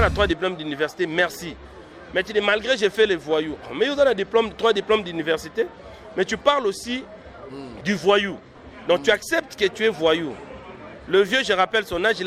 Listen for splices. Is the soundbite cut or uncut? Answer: uncut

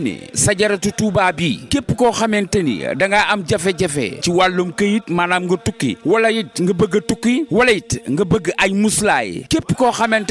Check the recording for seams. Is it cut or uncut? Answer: uncut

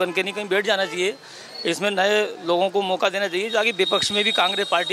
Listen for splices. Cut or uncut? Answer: uncut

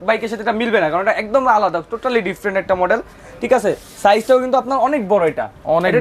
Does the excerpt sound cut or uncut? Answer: uncut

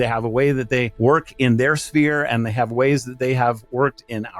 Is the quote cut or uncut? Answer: cut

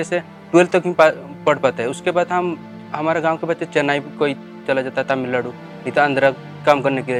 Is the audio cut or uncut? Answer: uncut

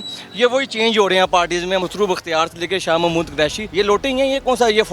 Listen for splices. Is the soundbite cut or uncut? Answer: cut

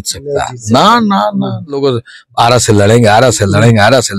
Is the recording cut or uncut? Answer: cut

